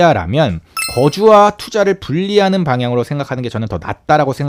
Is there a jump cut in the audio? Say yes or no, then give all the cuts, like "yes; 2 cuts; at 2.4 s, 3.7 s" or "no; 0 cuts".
no; 0 cuts